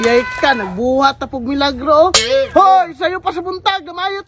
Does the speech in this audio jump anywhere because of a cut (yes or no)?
no